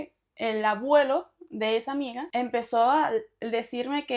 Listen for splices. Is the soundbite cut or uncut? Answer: cut